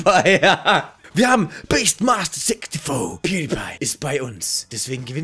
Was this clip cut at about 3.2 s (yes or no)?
yes